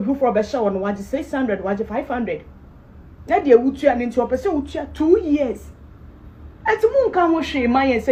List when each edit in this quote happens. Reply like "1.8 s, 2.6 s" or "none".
none